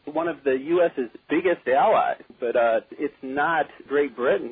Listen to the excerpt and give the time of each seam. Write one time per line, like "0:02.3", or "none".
0:02.3